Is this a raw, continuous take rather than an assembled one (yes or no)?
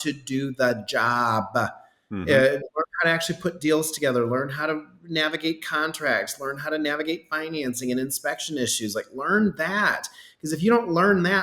yes